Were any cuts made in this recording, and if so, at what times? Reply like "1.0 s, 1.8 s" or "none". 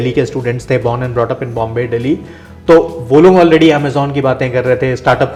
none